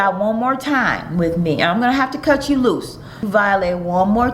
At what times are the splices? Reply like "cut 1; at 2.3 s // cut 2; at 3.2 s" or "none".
cut 1; at 3.3 s